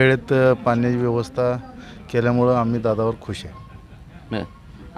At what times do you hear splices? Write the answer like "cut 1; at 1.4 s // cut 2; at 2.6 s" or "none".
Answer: none